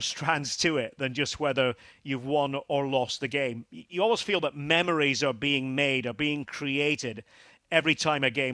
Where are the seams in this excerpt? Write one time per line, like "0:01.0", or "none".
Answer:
none

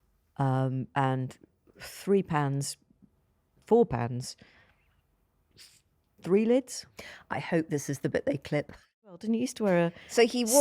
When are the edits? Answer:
0:09.2

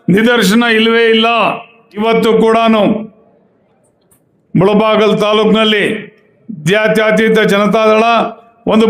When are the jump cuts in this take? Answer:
0:02.0

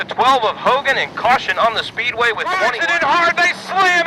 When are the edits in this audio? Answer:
0:02.7

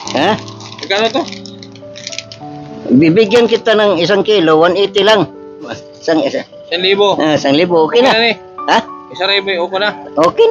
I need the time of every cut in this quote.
0:05.8

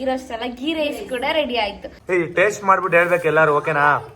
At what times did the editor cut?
0:01.9

